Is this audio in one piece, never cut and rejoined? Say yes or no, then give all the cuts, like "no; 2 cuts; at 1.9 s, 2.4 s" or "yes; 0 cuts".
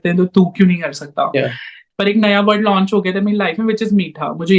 no; 1 cut; at 1.7 s